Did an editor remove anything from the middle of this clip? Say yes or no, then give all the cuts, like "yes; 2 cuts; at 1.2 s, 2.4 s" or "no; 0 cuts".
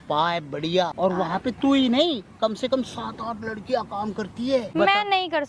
yes; 2 cuts; at 0.9 s, 4.7 s